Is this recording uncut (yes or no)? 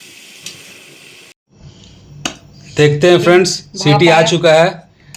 no